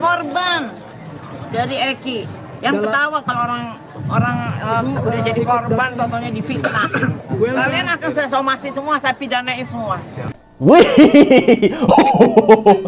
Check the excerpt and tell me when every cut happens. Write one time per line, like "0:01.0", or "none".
none